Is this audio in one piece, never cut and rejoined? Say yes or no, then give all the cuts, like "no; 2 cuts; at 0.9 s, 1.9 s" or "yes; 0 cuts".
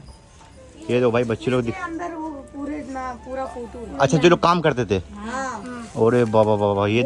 yes; 0 cuts